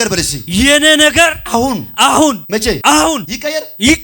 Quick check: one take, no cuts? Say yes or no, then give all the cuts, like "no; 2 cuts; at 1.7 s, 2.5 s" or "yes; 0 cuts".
no; 2 cuts; at 2.6 s, 3.2 s